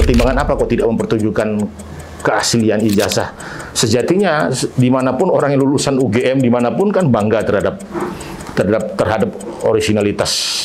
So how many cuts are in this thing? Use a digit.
0